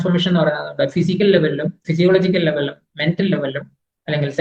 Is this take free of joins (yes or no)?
yes